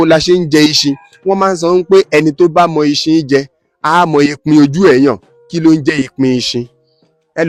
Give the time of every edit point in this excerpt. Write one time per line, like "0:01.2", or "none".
none